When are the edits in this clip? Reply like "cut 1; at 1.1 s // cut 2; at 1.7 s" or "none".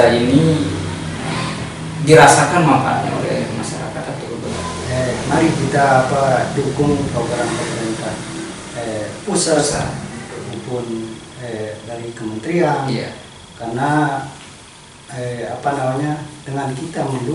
cut 1; at 4.5 s